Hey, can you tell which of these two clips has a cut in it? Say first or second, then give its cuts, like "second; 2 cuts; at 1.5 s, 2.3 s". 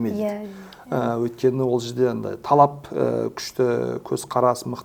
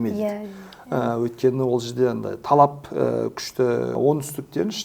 second; 1 cut; at 4.0 s